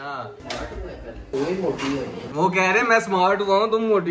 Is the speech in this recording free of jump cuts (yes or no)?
no